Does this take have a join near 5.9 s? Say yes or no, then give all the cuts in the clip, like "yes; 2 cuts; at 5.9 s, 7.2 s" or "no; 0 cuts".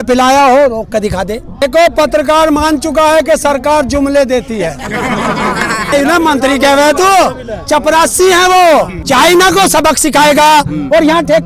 yes; 3 cuts; at 1.5 s, 5.9 s, 9.0 s